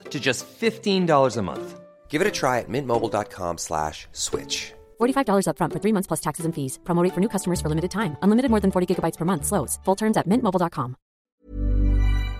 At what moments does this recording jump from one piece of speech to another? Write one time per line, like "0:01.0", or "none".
0:11.3

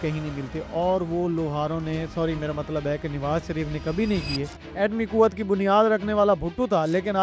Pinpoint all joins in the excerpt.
0:04.6

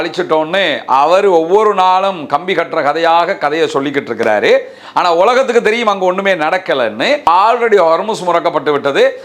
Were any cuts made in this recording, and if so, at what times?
0:07.2

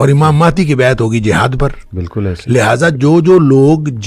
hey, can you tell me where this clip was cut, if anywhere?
none

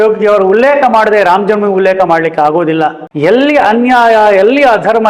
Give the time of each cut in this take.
0:03.0

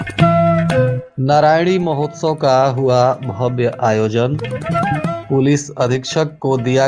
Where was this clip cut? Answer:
0:01.1

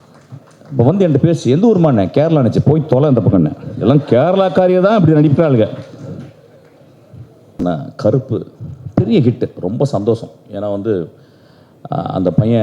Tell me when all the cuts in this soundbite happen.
0:07.6

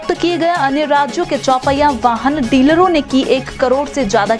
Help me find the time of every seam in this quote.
none

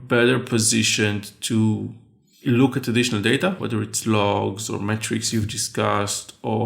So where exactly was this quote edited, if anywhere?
0:03.6

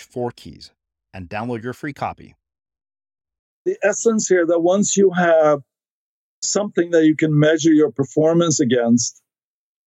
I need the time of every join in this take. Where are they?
0:03.7

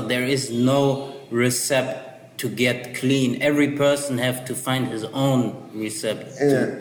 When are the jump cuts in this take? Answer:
none

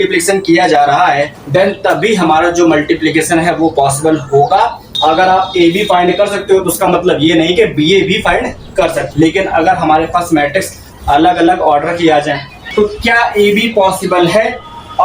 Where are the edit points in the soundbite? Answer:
0:01.4
0:04.8
0:09.0
0:12.7

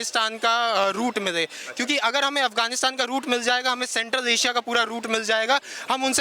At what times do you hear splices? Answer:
none

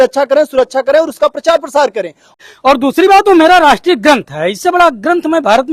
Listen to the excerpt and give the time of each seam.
0:02.3

